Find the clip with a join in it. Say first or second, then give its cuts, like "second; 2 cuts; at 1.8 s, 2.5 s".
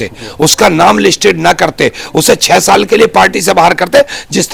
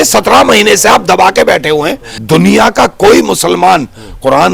second; 1 cut; at 2.1 s